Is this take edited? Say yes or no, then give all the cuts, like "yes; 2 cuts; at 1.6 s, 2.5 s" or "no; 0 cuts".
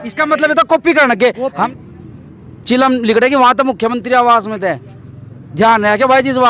yes; 1 cut; at 1.7 s